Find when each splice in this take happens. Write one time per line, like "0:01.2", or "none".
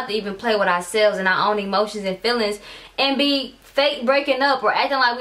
none